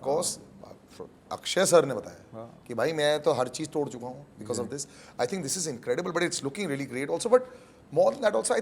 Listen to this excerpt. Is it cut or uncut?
uncut